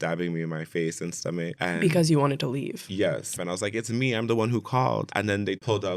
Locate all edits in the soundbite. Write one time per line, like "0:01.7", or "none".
0:01.5
0:03.3
0:05.1